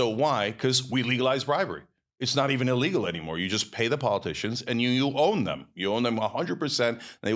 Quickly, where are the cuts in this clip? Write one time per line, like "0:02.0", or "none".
none

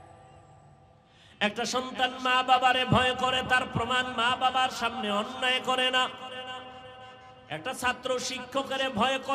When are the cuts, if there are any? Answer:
0:01.2

